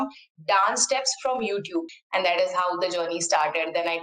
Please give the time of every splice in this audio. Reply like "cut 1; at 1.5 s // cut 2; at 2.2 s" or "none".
cut 1; at 2.0 s